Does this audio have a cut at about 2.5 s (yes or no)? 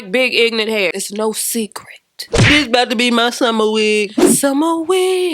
yes